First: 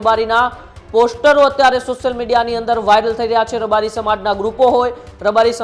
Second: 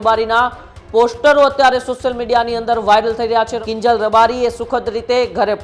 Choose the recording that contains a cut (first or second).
second